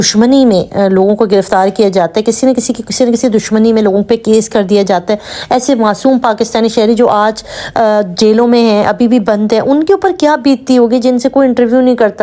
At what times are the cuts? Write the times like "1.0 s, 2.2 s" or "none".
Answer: none

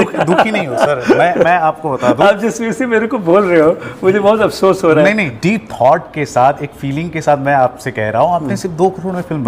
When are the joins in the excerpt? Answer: 5.3 s

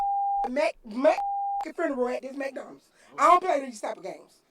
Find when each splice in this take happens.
3.2 s

